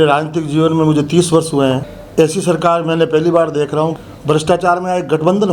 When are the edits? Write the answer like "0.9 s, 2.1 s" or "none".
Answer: 1.9 s, 4.0 s